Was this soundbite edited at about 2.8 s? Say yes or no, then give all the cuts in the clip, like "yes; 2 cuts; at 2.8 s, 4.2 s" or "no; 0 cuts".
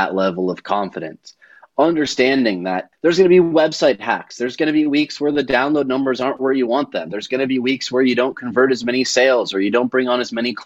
yes; 1 cut; at 2.8 s